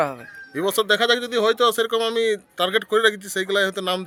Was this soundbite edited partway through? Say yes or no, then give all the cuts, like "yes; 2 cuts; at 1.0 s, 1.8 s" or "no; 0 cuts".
no; 0 cuts